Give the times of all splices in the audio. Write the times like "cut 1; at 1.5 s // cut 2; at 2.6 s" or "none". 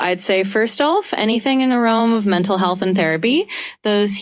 none